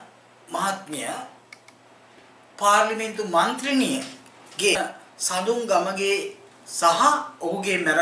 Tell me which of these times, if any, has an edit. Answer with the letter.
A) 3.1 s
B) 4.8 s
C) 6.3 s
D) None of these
B